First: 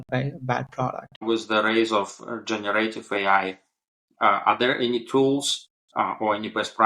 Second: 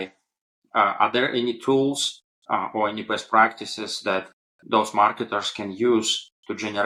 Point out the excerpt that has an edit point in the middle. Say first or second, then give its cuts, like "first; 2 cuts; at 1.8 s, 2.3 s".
first; 1 cut; at 1.2 s